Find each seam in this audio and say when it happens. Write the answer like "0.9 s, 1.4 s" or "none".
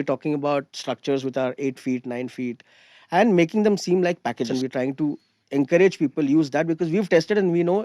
4.5 s